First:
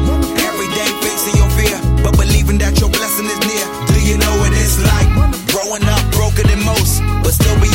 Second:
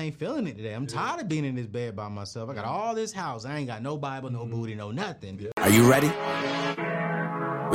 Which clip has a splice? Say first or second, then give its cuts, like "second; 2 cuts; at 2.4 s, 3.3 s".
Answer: second; 1 cut; at 5.5 s